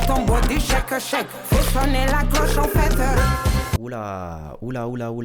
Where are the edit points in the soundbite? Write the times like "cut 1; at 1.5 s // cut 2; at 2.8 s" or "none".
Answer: cut 1; at 1.6 s